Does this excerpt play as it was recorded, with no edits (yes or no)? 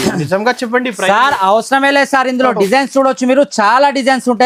yes